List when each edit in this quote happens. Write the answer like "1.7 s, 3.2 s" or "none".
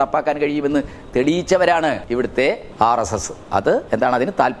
2.2 s, 3.8 s